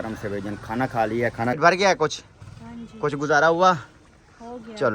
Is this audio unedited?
no; 1 cut; at 1.6 s

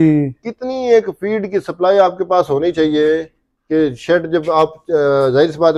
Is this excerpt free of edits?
yes; 0 cuts

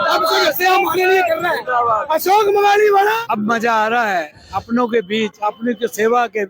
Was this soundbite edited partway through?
yes; 1 cut; at 3.2 s

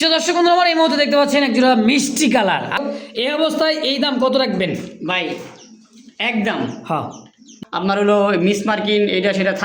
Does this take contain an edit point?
yes; 2 cuts; at 2.8 s, 7.5 s

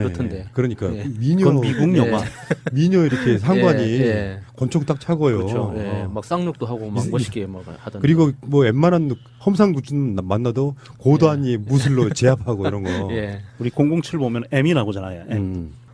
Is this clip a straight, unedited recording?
yes; 0 cuts

